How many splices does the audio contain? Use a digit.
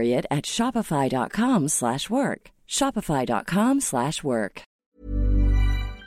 1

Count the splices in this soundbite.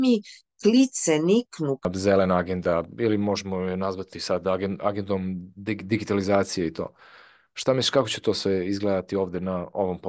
1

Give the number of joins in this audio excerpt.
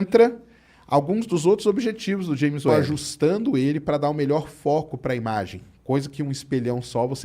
1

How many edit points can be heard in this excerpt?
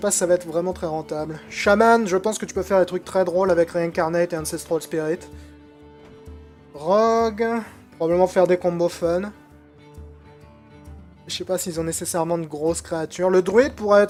0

